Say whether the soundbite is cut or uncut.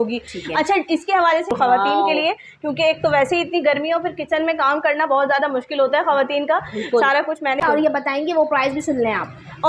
cut